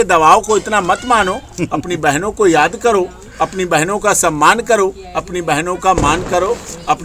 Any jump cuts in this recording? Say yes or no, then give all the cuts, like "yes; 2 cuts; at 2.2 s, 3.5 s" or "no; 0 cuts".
no; 0 cuts